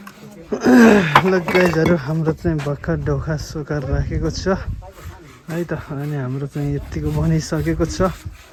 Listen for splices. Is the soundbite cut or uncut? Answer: uncut